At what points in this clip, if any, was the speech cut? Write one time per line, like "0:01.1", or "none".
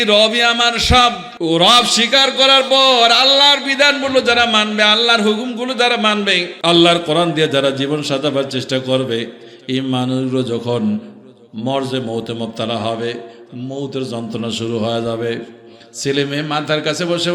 0:01.3
0:06.5